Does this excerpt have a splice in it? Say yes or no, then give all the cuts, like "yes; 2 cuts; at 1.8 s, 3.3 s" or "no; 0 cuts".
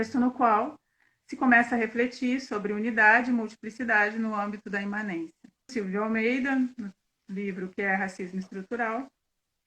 yes; 1 cut; at 5.8 s